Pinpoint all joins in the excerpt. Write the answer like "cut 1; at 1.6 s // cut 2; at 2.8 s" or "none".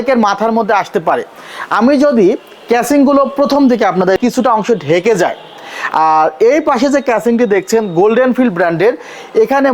cut 1; at 4.2 s